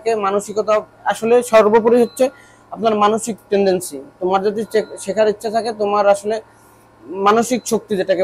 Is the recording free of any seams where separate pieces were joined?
yes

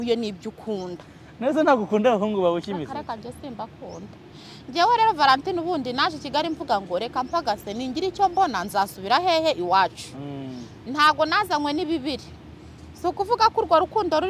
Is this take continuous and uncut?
yes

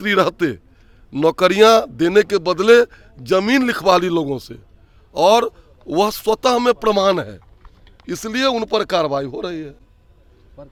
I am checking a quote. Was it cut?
no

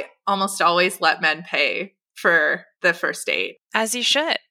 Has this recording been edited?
yes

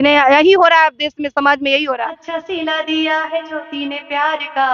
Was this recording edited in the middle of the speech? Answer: yes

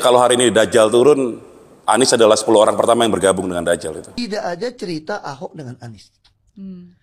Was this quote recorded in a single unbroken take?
no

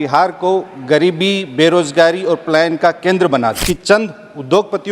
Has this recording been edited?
yes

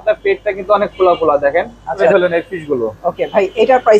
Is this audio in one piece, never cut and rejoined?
no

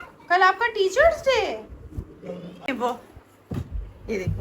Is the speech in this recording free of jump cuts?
no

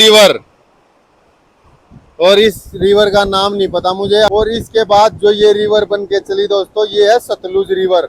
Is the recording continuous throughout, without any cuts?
no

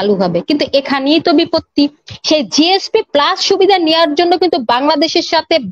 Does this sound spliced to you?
no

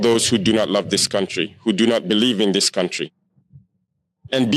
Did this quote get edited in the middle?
no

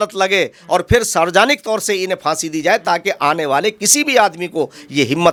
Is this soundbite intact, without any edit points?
yes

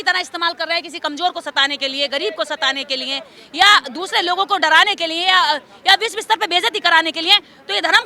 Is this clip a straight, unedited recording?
yes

